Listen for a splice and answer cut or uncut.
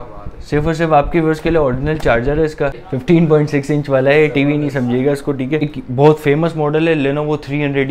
cut